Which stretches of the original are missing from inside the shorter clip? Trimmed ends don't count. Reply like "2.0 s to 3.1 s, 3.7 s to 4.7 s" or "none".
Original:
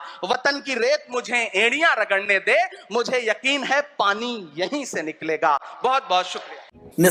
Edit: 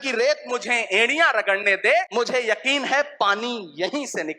2.7 s to 2.9 s